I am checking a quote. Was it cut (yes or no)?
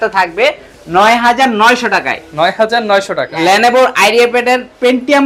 yes